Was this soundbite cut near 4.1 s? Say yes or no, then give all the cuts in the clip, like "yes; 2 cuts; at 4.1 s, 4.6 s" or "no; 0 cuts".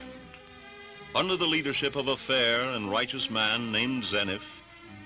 yes; 1 cut; at 4.1 s